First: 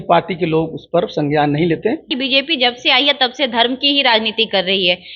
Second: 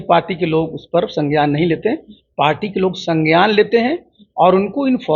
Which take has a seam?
first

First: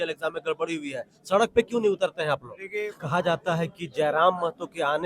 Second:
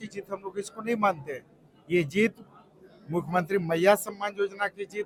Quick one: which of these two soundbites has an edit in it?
first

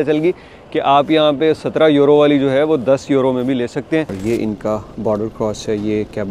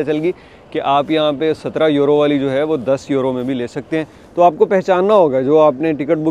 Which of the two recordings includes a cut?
first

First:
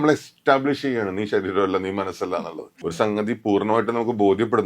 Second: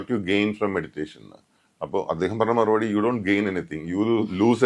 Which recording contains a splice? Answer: first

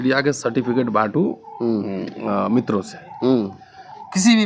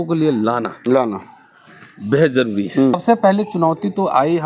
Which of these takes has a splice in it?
second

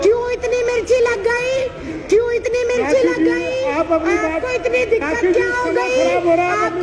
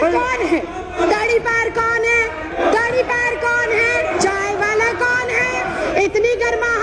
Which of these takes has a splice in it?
second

